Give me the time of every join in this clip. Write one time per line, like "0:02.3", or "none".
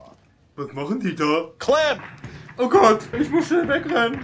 0:03.1